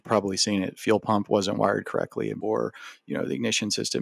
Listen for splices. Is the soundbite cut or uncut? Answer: cut